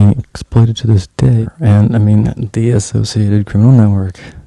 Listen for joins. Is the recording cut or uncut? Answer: cut